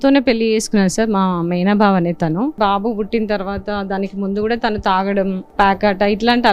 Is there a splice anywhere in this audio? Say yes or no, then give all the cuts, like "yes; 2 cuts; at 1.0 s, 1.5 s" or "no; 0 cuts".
yes; 2 cuts; at 2.6 s, 5.4 s